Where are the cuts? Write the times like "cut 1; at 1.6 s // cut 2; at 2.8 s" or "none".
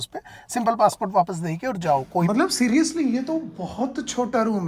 cut 1; at 2.3 s

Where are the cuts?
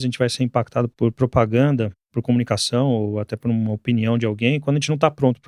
cut 1; at 0.9 s // cut 2; at 2.1 s

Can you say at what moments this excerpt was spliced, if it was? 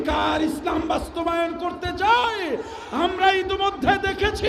none

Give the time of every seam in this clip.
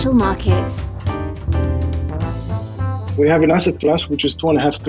cut 1; at 3.1 s

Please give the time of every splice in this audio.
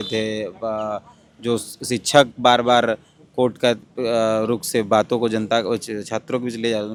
none

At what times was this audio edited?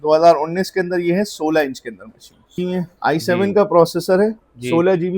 cut 1; at 2.5 s

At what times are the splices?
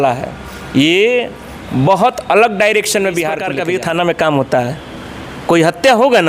cut 1; at 3.5 s

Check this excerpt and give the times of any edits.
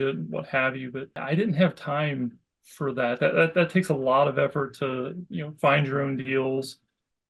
cut 1; at 1.2 s

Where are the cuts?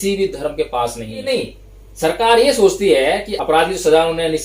cut 1; at 1.3 s // cut 2; at 3.3 s

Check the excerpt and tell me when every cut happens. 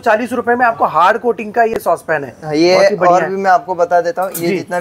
none

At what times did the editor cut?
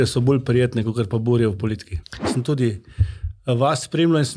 cut 1; at 2.2 s

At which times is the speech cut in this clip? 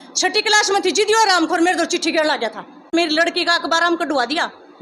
cut 1; at 2.9 s

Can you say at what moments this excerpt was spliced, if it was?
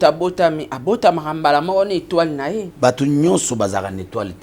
cut 1; at 2.7 s

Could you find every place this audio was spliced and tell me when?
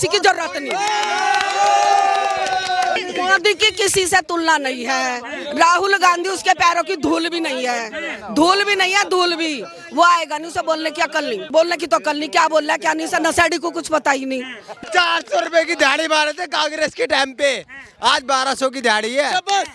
cut 1; at 3.0 s // cut 2; at 11.5 s // cut 3; at 14.6 s

